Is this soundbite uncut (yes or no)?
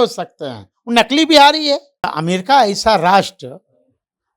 no